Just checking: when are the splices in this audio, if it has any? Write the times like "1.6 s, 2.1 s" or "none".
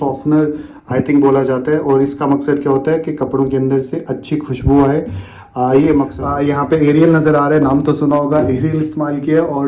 6.2 s